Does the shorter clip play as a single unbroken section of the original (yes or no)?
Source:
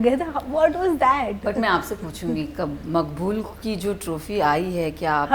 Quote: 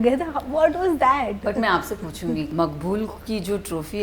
no